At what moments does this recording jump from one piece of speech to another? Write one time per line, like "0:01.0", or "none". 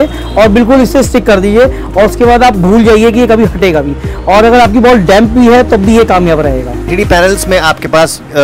0:06.9